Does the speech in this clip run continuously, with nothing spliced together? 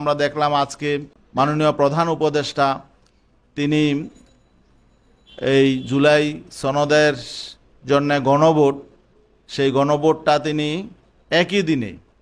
no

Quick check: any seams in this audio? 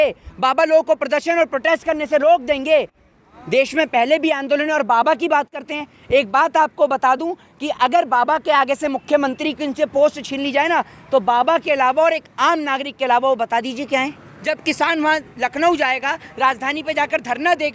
yes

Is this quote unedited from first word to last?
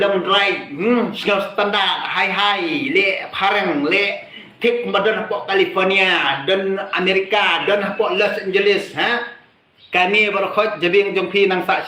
yes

